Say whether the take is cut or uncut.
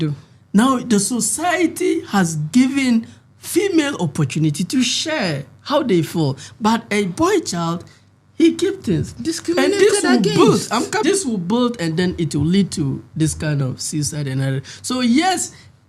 cut